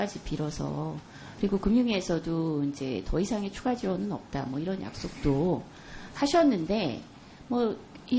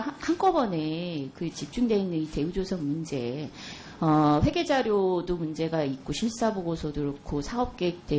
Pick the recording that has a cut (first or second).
second